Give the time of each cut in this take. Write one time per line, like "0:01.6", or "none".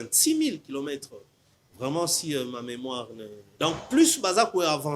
0:03.4